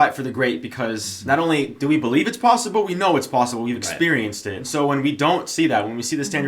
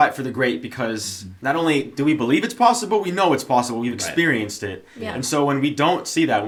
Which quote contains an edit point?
first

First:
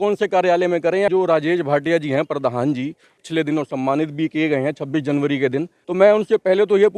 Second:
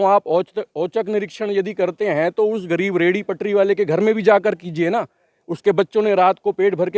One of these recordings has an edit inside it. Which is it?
first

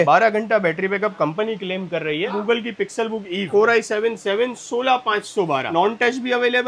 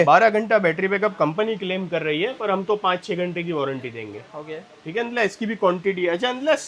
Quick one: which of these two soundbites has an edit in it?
first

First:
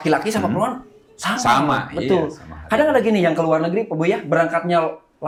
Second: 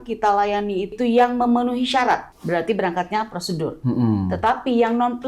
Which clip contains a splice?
second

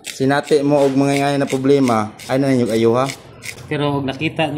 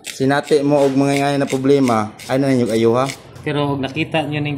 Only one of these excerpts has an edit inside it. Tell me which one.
second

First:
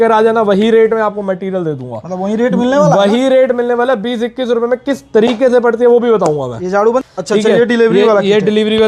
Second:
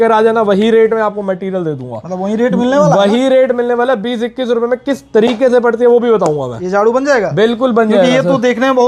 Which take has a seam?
first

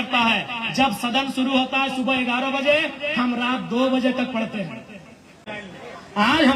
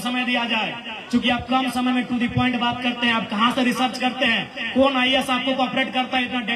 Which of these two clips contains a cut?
first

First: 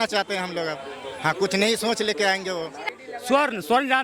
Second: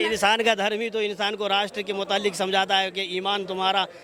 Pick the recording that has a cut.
first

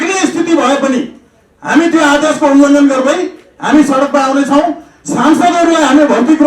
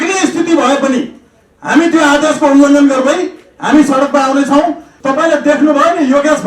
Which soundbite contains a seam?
second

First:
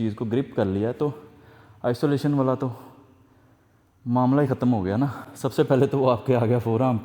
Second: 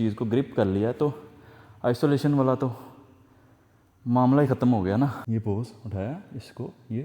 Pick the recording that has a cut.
second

